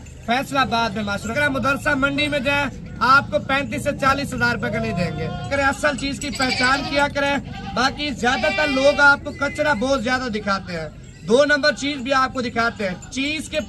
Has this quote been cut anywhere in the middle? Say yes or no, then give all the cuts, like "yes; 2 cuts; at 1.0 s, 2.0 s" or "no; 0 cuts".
yes; 2 cuts; at 1.3 s, 5.5 s